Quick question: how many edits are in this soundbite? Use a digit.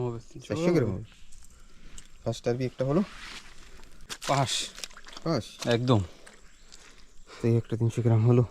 1